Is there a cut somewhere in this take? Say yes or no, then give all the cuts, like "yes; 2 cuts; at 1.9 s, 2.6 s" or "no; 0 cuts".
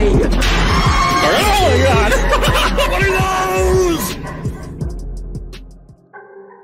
no; 0 cuts